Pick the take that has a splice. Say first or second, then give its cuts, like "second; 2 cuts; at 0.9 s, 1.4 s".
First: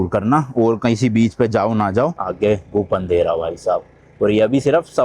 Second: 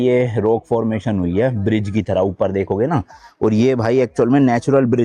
first; 1 cut; at 2.2 s